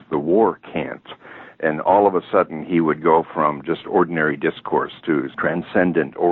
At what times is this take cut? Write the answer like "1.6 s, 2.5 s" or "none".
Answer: none